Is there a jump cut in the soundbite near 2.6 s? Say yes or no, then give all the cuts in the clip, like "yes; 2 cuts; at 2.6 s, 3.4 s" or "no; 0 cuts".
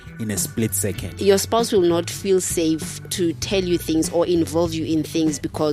no; 1 cut; at 1.1 s